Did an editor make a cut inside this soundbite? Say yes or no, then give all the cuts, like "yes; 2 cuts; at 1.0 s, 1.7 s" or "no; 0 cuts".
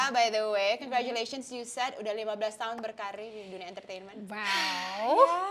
no; 0 cuts